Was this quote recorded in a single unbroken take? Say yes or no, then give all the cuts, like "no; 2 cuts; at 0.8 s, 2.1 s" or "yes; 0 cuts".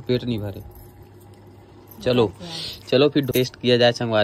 no; 1 cut; at 3.3 s